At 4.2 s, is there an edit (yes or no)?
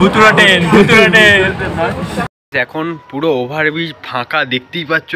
no